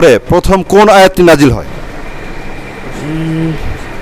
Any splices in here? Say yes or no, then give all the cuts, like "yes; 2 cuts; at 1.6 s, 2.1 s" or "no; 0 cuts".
no; 0 cuts